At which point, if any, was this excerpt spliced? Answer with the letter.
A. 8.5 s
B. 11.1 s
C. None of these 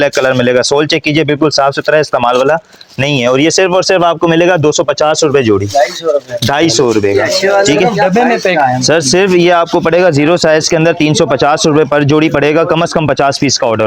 A